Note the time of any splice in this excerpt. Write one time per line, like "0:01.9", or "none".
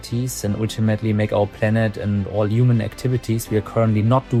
none